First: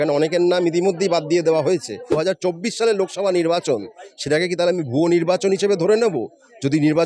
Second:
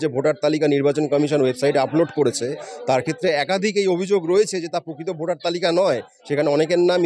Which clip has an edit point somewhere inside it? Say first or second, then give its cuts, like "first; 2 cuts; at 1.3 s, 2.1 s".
first; 1 cut; at 2.0 s